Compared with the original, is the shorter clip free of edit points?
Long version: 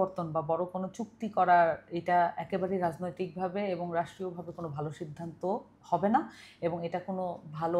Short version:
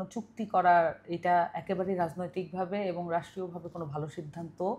yes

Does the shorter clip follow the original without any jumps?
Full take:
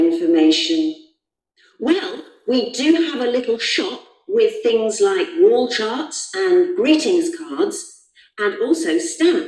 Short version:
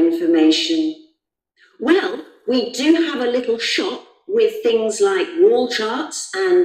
yes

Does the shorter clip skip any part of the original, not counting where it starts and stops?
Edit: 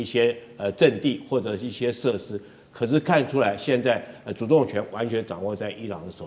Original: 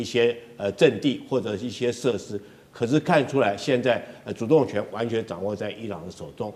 no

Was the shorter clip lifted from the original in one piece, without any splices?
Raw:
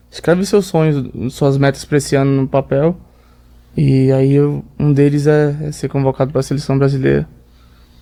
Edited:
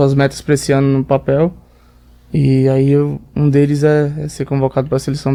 yes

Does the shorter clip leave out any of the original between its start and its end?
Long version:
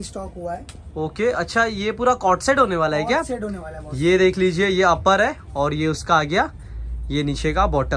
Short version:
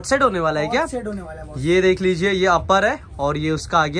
no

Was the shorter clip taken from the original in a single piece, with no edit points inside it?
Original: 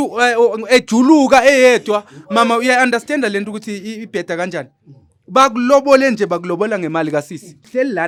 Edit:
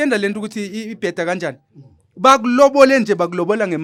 yes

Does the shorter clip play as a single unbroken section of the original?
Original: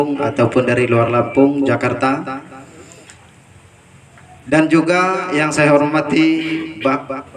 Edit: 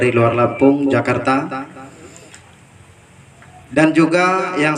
yes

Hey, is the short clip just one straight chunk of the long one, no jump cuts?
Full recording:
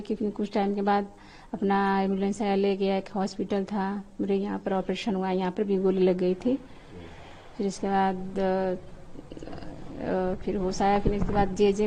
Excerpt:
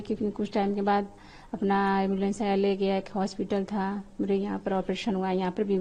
yes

